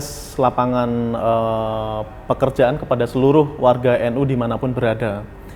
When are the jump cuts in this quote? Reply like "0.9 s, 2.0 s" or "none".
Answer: none